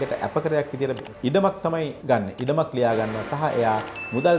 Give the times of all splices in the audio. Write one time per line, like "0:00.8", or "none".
0:01.9